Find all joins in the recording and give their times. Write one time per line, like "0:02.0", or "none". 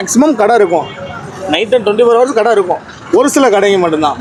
none

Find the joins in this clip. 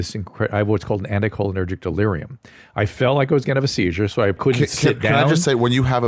0:04.4

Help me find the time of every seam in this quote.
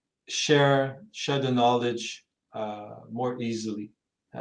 none

